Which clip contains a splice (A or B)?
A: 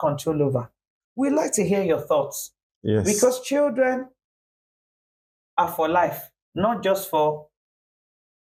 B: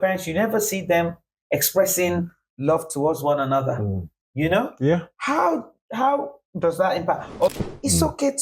B